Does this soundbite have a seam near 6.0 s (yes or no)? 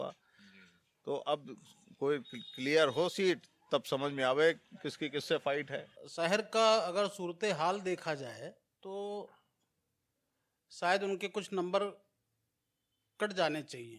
yes